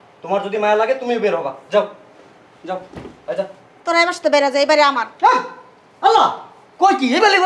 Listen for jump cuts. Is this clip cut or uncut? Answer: uncut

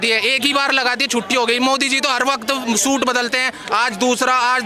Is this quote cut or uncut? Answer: uncut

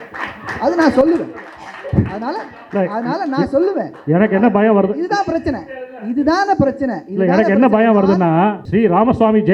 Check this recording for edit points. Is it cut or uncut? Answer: cut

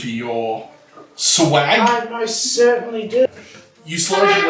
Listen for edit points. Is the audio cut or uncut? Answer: cut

